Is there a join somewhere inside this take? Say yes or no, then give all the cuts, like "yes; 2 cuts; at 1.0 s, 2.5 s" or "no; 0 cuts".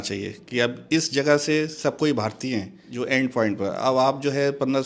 yes; 1 cut; at 2.8 s